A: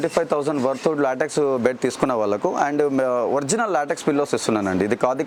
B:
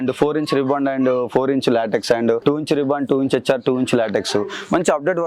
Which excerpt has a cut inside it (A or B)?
B